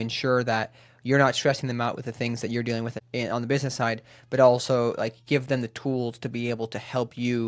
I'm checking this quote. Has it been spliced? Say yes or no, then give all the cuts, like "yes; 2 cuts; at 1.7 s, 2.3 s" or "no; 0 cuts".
yes; 1 cut; at 3.0 s